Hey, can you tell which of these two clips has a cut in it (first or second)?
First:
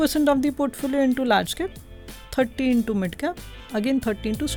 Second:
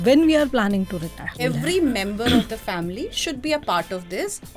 second